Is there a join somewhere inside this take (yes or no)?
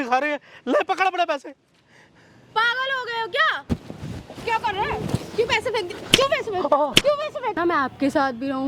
yes